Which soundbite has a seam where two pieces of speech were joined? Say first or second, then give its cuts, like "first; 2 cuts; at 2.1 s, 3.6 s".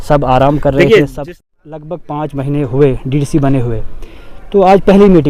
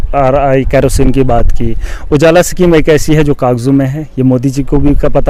first; 1 cut; at 1.2 s